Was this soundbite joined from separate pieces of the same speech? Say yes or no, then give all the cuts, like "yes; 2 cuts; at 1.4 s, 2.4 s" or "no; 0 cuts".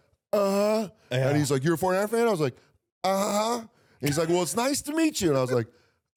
no; 0 cuts